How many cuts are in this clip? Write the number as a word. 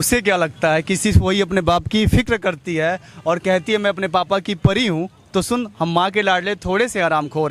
zero